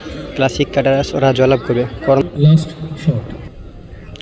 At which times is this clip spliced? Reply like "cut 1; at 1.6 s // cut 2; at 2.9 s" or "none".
cut 1; at 2.3 s